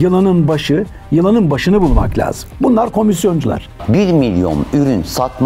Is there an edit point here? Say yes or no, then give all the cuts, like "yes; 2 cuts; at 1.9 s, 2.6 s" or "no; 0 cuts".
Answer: yes; 1 cut; at 3.8 s